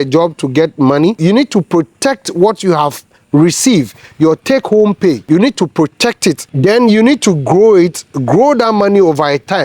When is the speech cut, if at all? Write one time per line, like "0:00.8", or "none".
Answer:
0:01.2

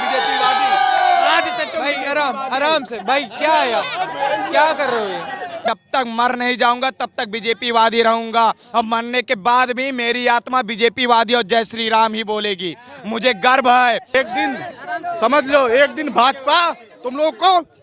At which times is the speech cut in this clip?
0:05.7
0:14.1

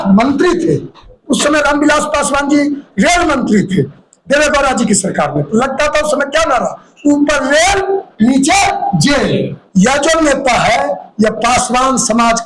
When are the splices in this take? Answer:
0:01.1
0:09.6

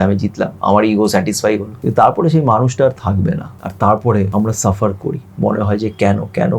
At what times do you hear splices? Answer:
0:01.8
0:03.6
0:04.3

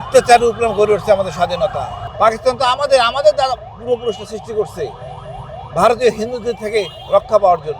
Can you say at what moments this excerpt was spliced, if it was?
0:02.0

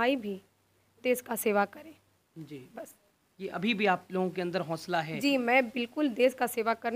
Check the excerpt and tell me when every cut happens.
none

